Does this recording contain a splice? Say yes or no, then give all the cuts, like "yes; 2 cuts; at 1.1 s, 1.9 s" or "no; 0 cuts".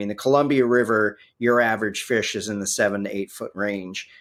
no; 0 cuts